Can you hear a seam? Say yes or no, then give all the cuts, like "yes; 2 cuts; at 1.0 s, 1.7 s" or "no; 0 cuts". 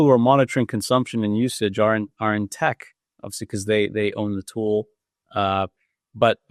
no; 0 cuts